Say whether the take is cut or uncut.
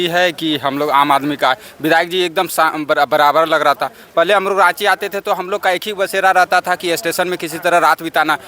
uncut